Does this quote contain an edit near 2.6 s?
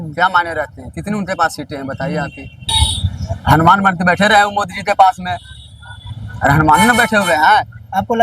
yes; 1 cut; at 2.6 s

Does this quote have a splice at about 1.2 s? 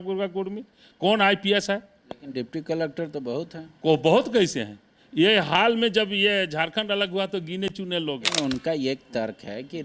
no; 1 cut; at 8.3 s

